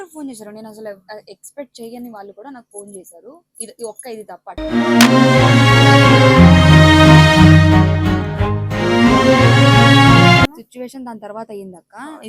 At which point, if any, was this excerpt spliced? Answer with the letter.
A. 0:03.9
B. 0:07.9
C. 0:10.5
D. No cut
C